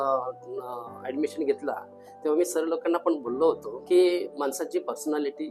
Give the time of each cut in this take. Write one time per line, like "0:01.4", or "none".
0:03.7
0:04.3

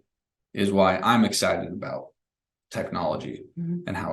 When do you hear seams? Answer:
none

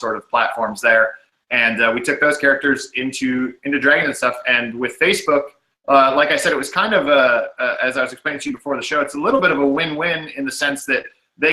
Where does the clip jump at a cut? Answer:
0:05.5

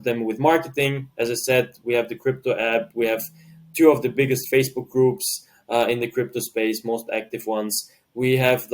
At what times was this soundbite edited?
none

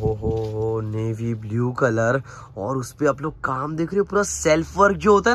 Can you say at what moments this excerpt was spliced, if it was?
none

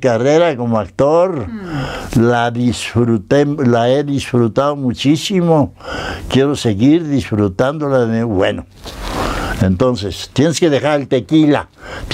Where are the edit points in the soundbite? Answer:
none

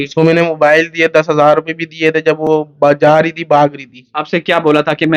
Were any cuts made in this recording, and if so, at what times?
none

